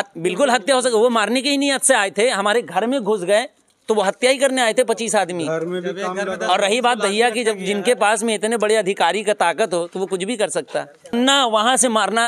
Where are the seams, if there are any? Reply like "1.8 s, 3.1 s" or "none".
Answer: 11.1 s